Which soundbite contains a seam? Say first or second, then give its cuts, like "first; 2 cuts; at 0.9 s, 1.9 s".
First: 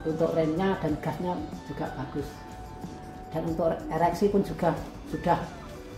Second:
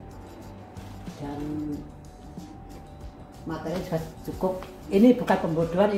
second; 1 cut; at 4.8 s